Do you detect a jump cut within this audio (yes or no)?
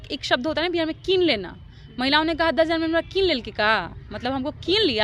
no